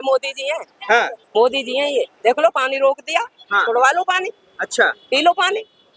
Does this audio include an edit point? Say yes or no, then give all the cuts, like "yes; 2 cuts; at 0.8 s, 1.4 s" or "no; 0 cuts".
no; 0 cuts